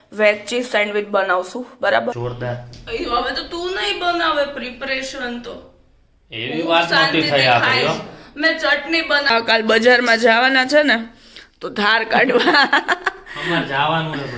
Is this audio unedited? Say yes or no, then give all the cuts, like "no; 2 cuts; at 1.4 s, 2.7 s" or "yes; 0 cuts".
no; 2 cuts; at 2.2 s, 9.3 s